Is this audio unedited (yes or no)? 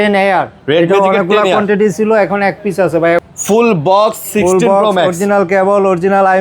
no